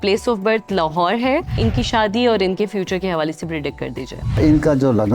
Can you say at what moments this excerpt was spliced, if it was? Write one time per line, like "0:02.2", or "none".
0:01.6
0:04.4